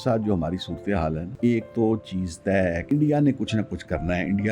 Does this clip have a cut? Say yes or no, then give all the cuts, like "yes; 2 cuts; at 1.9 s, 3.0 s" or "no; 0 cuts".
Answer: yes; 2 cuts; at 1.3 s, 2.8 s